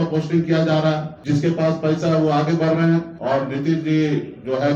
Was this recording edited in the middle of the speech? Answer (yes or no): yes